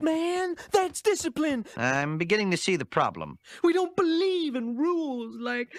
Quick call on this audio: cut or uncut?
uncut